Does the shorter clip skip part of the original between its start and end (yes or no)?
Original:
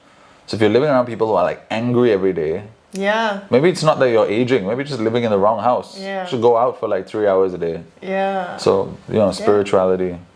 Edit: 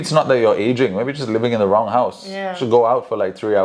no